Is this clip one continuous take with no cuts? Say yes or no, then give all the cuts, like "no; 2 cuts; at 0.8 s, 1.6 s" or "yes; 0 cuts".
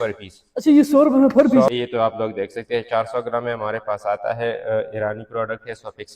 no; 1 cut; at 1.7 s